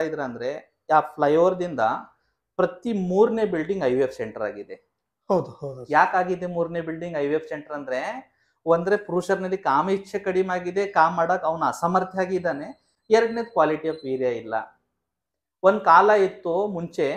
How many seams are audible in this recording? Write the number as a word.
zero